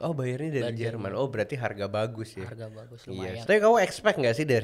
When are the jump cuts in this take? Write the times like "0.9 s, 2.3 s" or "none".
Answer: 3.3 s